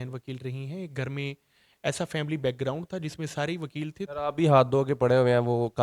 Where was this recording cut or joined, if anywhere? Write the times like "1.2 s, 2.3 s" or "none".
4.0 s